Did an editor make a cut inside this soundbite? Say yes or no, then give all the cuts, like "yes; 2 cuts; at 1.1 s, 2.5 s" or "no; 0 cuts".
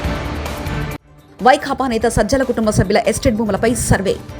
yes; 1 cut; at 1.2 s